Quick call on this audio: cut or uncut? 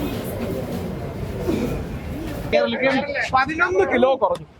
cut